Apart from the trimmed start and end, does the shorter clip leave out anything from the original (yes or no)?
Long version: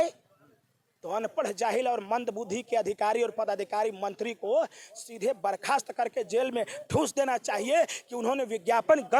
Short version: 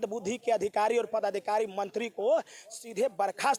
no